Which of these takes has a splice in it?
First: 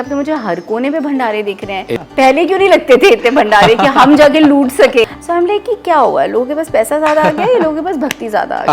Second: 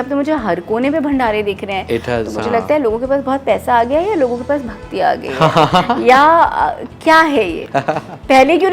first; 2 cuts; at 2.0 s, 5.2 s

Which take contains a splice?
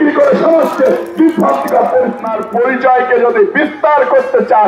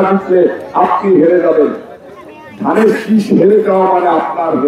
first; 1 cut; at 2.2 s

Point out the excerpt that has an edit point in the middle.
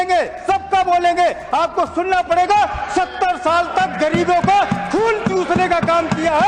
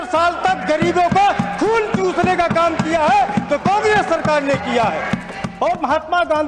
second; 1 cut; at 5.4 s

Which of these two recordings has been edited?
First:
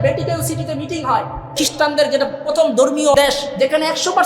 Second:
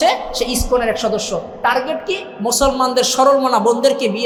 first; 2 cuts; at 1.6 s, 3.2 s

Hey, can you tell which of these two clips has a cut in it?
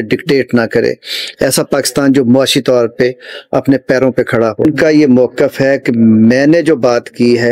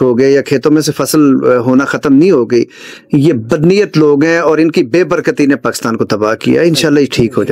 first; 1 cut; at 4.6 s

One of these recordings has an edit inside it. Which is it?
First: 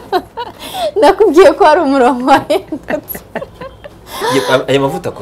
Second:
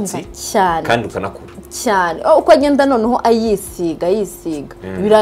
first; 1 cut; at 4.1 s

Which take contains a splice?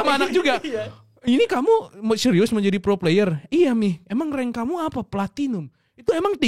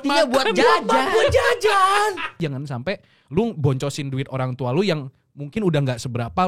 second; 1 cut; at 2.3 s

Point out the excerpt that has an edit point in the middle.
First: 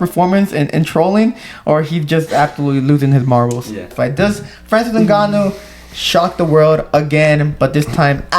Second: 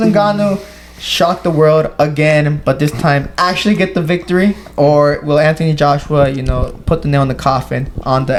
first; 1 cut; at 3.9 s

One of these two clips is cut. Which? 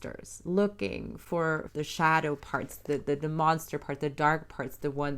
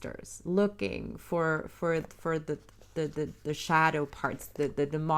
first; 1 cut; at 1.7 s

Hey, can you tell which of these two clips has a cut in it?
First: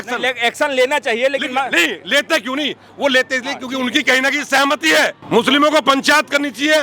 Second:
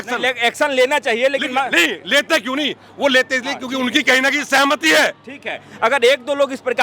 first; 1 cut; at 5.2 s

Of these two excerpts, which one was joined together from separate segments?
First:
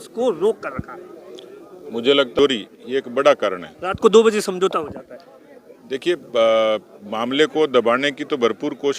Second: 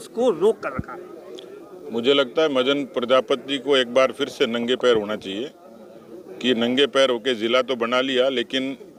first; 1 cut; at 2.4 s

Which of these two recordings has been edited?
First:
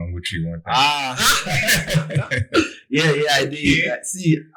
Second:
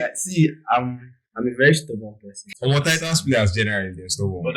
second; 1 cut; at 2.5 s

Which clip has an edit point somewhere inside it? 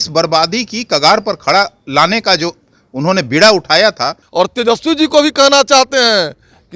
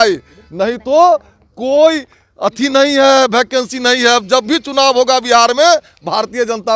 first; 1 cut; at 4.1 s

